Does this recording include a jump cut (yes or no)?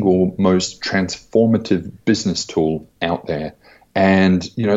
no